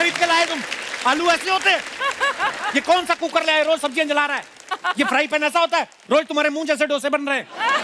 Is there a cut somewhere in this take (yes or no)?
no